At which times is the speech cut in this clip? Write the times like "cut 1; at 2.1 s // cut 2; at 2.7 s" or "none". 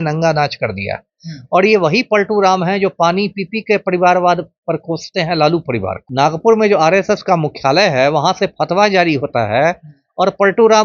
cut 1; at 6.0 s